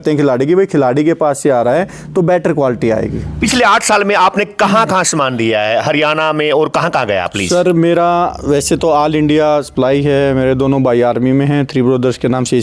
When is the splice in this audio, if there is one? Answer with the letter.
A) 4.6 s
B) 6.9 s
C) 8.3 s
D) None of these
D